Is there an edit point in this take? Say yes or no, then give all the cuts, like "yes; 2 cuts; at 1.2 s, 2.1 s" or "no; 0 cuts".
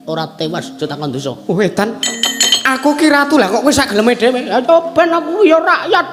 no; 0 cuts